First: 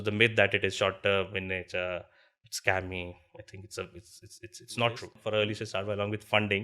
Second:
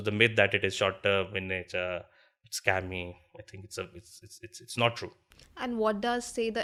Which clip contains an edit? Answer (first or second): first